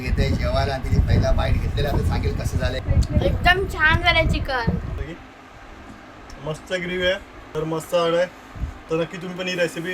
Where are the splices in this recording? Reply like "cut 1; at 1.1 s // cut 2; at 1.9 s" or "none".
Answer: cut 1; at 2.8 s // cut 2; at 5.0 s // cut 3; at 7.4 s